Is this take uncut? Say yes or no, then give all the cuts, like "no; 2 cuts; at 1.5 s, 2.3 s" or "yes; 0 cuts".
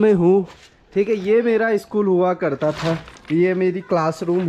yes; 0 cuts